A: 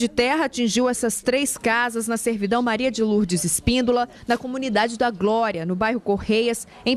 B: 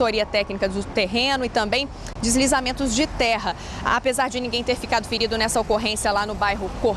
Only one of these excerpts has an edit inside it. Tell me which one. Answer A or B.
A